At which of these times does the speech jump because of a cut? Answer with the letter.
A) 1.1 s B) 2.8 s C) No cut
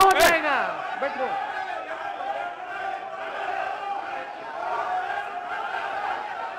C